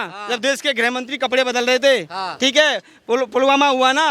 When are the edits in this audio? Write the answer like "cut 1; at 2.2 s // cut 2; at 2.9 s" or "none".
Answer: none